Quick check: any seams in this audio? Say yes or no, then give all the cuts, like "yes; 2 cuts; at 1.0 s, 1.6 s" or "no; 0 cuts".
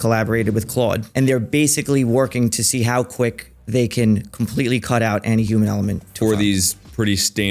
yes; 1 cut; at 1.1 s